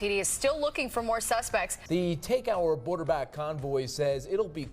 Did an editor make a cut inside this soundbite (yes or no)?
yes